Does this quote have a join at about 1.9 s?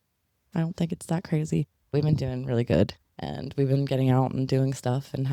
yes; 1 cut; at 1.9 s

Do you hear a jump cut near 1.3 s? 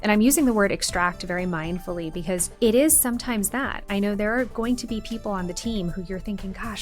no; 1 cut; at 2.5 s

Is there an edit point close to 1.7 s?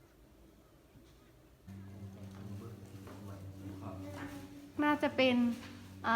yes; 1 cut; at 1.7 s

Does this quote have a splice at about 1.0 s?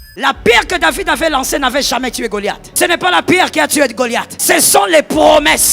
no; 2 cuts; at 2.6 s, 4.3 s

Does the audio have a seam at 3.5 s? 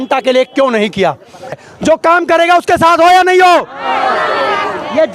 no; 1 cut; at 1.5 s

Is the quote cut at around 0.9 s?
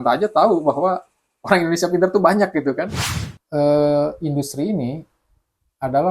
no; 1 cut; at 3.1 s

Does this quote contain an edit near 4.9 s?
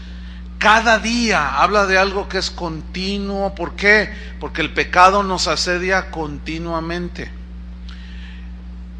yes; 1 cut; at 4.9 s

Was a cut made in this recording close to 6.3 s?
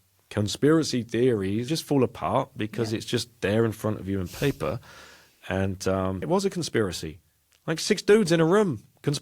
yes; 2 cuts; at 1.7 s, 6.3 s

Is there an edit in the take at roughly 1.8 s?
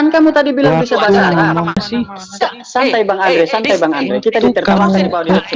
yes; 1 cut; at 1.8 s

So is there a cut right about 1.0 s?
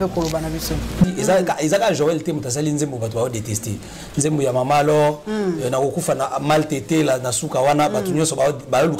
yes; 1 cut; at 1.0 s

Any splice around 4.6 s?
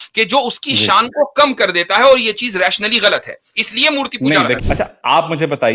yes; 1 cut; at 4.6 s

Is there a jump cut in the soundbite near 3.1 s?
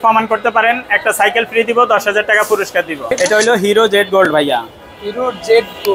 yes; 1 cut; at 3.1 s

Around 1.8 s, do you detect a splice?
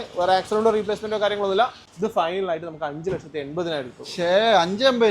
yes; 1 cut; at 1.8 s

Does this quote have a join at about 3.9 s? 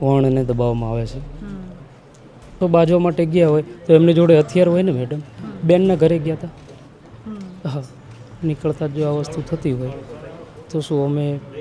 no; 1 cut; at 2.6 s

